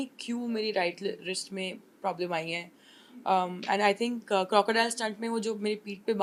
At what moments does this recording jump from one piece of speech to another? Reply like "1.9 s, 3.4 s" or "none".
none